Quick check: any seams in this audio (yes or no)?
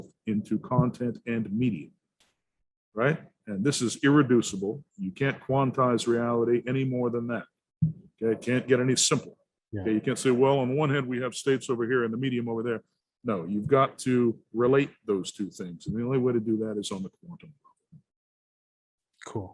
no